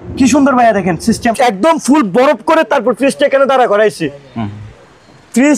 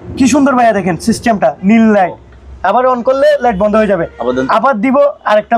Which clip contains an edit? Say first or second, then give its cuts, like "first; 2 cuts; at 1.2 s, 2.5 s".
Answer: first; 1 cut; at 1.3 s